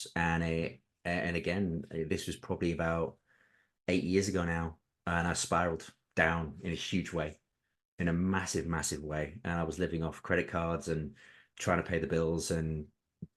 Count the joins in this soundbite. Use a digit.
0